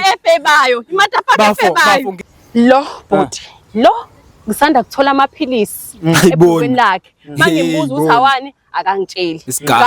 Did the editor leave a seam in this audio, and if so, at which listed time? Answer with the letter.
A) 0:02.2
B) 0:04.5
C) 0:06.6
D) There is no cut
A